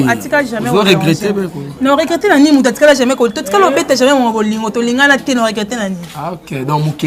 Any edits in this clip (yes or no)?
no